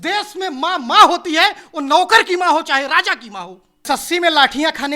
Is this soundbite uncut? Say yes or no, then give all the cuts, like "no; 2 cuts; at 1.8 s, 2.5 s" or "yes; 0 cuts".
no; 1 cut; at 3.8 s